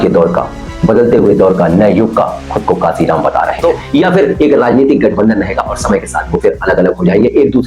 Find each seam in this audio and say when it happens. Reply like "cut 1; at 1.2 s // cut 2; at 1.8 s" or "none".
cut 1; at 3.6 s